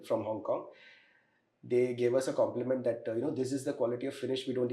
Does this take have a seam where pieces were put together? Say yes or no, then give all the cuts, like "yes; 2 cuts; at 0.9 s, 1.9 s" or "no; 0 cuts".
no; 0 cuts